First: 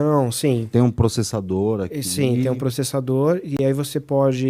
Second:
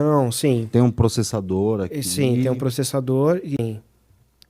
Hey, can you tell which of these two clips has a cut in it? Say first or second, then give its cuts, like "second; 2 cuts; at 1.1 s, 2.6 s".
second; 1 cut; at 3.6 s